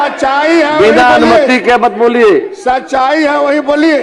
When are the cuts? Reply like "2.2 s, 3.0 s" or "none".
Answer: none